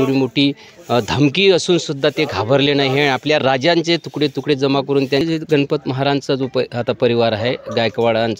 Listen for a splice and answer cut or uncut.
cut